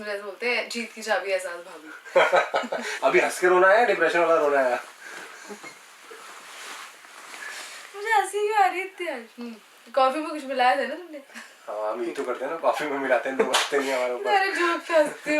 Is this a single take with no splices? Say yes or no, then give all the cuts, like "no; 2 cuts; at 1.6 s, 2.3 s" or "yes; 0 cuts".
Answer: no; 1 cut; at 2.9 s